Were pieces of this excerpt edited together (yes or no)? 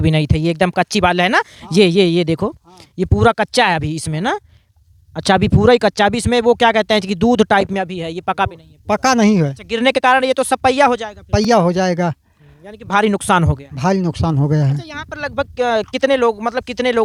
no